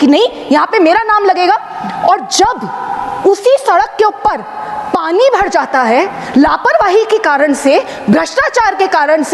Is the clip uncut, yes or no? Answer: yes